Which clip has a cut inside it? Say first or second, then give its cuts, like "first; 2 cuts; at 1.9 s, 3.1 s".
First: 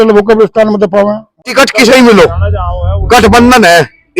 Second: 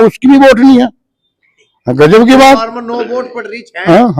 first; 1 cut; at 1.5 s